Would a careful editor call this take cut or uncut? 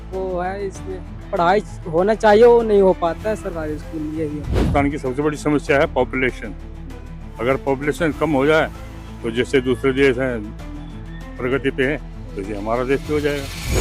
cut